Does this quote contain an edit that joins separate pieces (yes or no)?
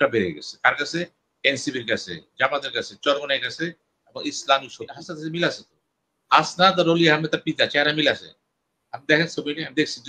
yes